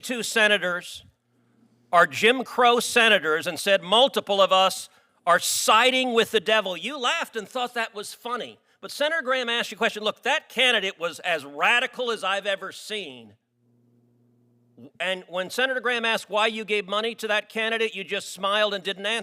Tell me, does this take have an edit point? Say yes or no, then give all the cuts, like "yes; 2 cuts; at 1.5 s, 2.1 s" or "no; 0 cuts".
no; 0 cuts